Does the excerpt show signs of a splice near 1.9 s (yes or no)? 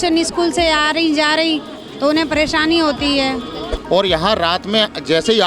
no